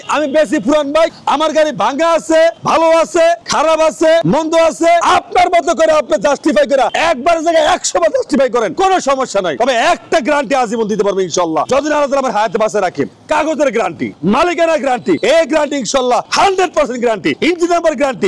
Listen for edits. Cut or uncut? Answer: uncut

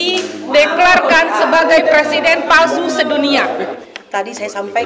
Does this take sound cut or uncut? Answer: cut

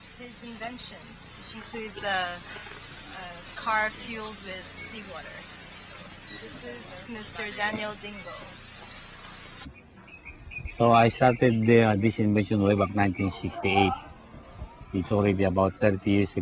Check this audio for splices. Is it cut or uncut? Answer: uncut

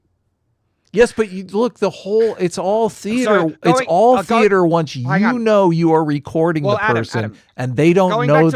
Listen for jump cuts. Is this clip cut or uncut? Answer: uncut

